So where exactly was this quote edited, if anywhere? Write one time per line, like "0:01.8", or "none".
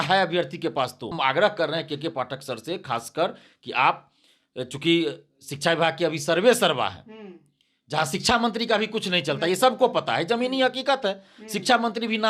0:01.1

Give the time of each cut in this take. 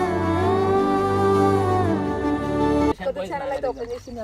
0:02.9

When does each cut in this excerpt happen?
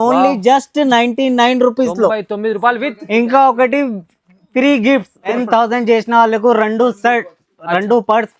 0:05.3

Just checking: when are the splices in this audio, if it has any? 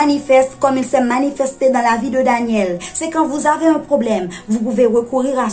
none

